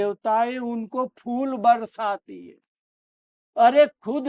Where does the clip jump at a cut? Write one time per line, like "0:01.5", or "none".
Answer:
0:03.4